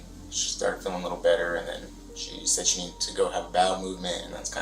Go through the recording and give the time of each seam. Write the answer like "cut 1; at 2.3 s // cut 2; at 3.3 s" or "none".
cut 1; at 1.9 s